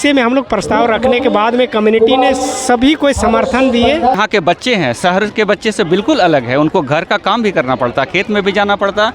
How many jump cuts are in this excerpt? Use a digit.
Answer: 1